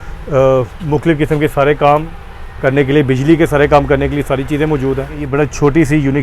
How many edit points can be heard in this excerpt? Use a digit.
1